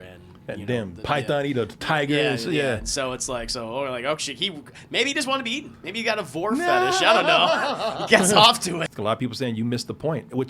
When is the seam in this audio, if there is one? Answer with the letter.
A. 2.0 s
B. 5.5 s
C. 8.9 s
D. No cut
C